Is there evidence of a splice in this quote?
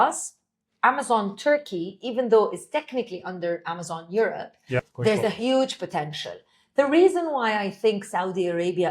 yes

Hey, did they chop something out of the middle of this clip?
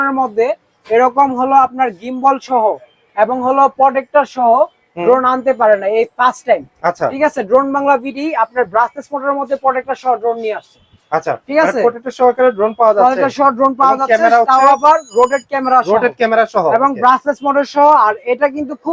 no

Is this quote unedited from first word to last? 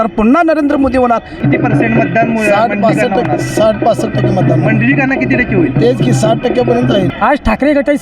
no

